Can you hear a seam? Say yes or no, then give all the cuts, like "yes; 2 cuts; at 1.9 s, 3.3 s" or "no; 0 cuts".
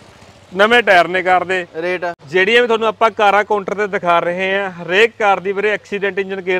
yes; 1 cut; at 2.2 s